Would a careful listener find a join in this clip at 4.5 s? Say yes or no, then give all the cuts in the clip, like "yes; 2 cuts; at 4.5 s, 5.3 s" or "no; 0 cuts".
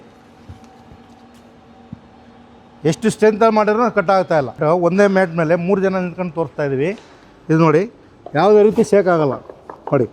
yes; 1 cut; at 4.5 s